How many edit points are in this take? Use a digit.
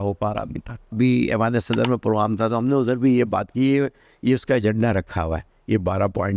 1